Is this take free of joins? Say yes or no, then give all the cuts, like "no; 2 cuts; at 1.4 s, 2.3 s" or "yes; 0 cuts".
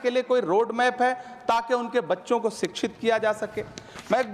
yes; 0 cuts